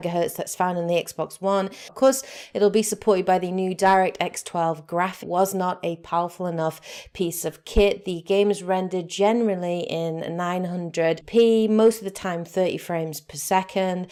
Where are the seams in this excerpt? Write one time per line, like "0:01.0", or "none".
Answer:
none